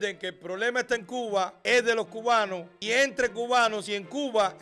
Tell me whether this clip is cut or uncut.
cut